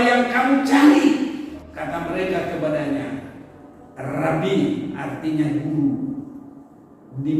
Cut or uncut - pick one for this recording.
cut